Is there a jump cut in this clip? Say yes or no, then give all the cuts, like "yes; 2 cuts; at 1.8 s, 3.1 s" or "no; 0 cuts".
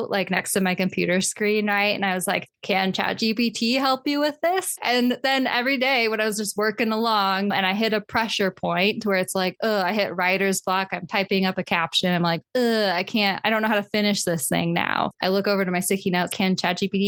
no; 0 cuts